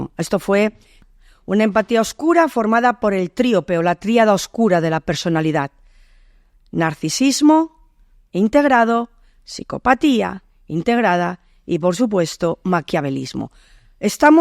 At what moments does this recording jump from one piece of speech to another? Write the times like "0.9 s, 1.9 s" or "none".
0.9 s